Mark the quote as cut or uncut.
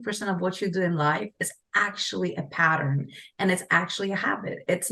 uncut